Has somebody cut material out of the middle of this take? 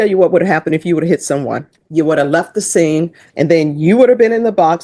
yes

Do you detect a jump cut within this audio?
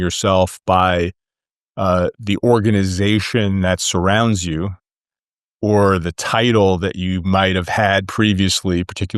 no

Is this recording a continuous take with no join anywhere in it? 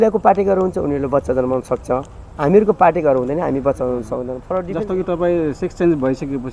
no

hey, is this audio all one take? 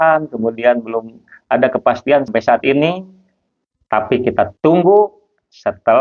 no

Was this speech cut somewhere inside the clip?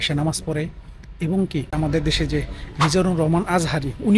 yes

